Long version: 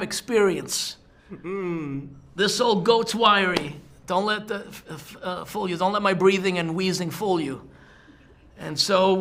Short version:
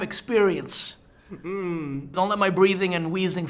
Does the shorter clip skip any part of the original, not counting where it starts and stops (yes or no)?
yes